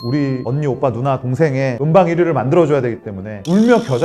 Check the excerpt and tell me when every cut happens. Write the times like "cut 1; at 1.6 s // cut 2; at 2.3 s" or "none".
none